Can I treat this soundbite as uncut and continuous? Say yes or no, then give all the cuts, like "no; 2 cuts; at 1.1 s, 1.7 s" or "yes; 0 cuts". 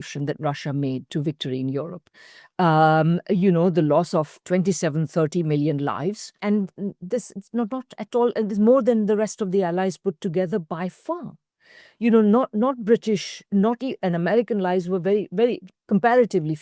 no; 2 cuts; at 4.4 s, 6.4 s